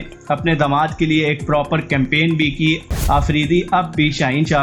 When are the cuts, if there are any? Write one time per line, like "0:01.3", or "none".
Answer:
0:02.9